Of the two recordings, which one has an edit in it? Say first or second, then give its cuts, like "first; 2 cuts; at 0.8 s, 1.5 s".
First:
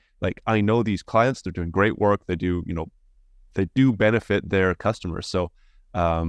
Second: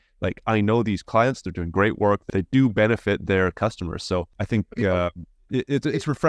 second; 2 cuts; at 2.2 s, 4.4 s